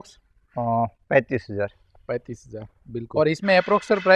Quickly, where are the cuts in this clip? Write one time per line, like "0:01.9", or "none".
0:03.0